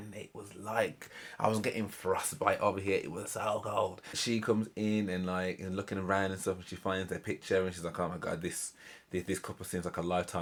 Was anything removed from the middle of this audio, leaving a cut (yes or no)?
no